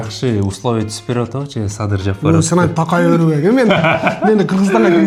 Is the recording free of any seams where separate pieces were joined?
yes; 0 cuts

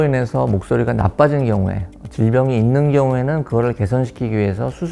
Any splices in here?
no; 0 cuts

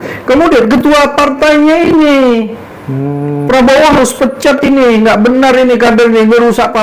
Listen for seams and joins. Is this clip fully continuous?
yes; 0 cuts

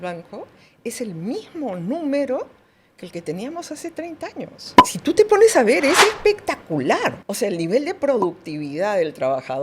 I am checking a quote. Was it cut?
yes; 1 cut; at 7.2 s

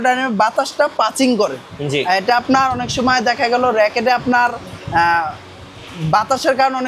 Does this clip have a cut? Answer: no; 0 cuts

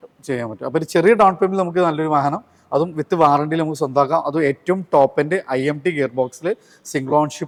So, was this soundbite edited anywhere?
no; 0 cuts

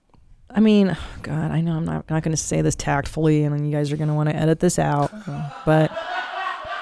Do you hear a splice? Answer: no; 0 cuts

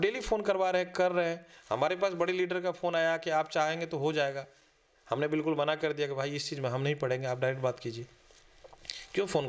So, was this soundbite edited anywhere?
no; 0 cuts

